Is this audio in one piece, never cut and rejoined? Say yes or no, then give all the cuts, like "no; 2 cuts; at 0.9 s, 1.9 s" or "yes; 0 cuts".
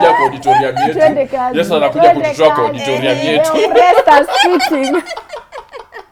yes; 0 cuts